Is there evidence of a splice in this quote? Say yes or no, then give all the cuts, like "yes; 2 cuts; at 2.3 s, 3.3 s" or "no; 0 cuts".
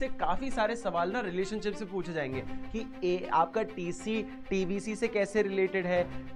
no; 0 cuts